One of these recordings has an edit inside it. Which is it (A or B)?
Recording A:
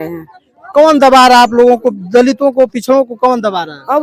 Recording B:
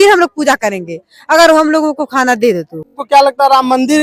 B